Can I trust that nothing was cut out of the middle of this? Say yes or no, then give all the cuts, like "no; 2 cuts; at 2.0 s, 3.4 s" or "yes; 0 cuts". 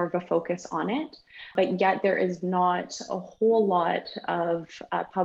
no; 1 cut; at 1.5 s